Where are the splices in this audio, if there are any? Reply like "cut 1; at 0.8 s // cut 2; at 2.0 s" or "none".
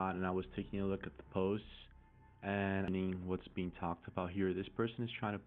cut 1; at 2.9 s